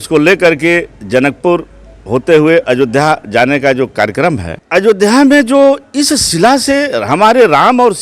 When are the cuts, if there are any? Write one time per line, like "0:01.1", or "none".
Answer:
0:04.5